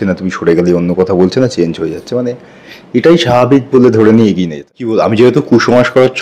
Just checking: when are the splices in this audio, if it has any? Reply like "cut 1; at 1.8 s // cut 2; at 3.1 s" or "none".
cut 1; at 5.1 s

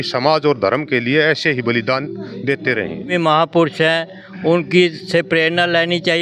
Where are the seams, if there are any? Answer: cut 1; at 3.1 s

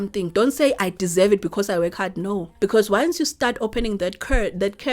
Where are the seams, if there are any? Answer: cut 1; at 2.5 s

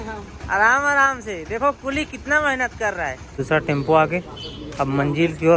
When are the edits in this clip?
cut 1; at 3.4 s

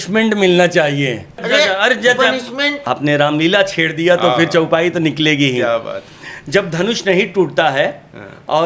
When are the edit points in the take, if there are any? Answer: cut 1; at 1.4 s // cut 2; at 2.8 s

